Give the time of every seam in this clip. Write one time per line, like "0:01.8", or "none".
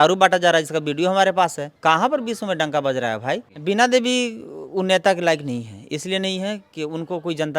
0:01.7
0:03.5